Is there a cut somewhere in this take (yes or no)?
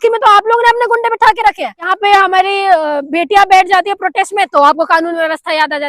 yes